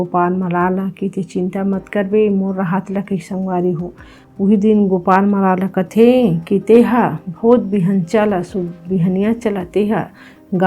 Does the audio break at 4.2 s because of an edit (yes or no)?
yes